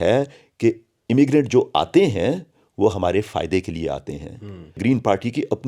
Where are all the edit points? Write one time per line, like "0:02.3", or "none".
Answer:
0:04.6